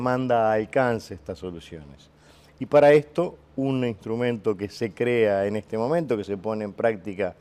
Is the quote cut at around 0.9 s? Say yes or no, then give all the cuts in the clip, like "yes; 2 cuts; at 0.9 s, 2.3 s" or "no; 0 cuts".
no; 0 cuts